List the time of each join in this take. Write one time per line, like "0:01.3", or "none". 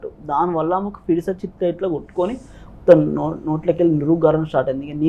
none